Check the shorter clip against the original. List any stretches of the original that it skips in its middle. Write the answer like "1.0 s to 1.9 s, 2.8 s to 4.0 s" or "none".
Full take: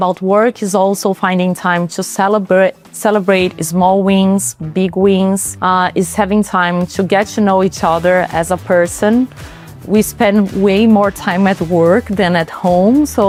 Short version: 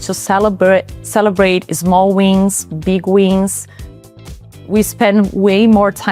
5.9 s to 9.3 s